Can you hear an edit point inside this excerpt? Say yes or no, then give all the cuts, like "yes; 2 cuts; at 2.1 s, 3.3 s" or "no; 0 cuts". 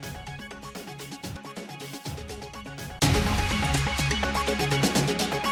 no; 0 cuts